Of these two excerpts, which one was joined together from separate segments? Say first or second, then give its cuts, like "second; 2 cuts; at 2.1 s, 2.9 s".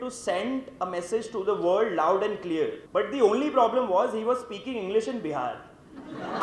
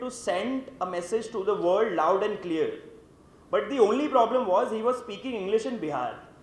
first; 1 cut; at 2.8 s